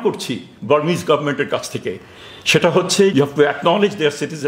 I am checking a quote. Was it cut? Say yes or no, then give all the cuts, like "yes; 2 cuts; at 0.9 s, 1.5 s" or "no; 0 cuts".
yes; 1 cut; at 3.1 s